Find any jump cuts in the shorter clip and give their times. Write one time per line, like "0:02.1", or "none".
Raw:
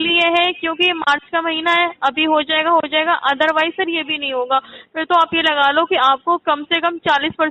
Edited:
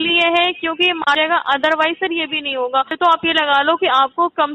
0:01.2
0:02.9

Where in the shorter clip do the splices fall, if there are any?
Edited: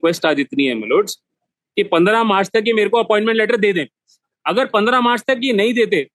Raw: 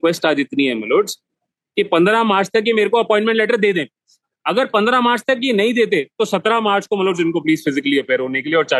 none

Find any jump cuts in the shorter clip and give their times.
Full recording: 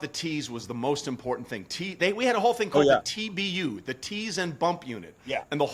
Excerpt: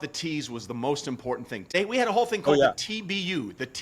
0:01.6

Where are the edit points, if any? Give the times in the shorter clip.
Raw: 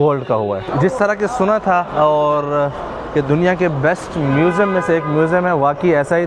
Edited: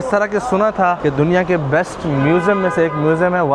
0:01.0

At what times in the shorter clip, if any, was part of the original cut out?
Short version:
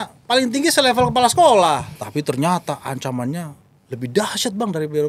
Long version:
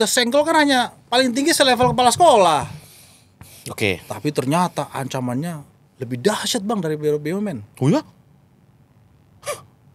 0:02.0

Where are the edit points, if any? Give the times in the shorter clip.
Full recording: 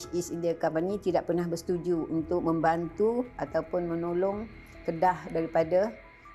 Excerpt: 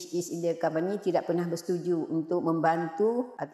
none

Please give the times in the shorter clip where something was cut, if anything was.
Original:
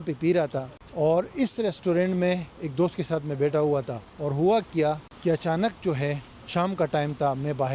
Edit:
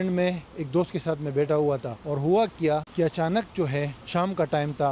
0:02.0
0:02.9
0:04.0

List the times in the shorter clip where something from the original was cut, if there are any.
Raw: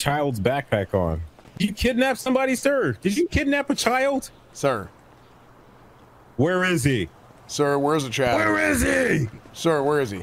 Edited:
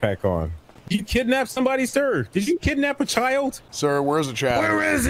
0:03.7

